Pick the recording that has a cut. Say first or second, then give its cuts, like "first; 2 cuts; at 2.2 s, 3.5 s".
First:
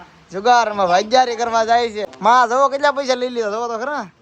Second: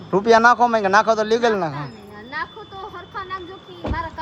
first; 1 cut; at 2.0 s